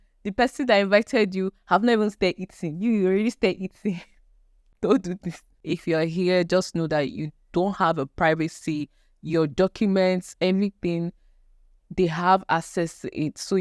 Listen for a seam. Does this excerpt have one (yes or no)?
yes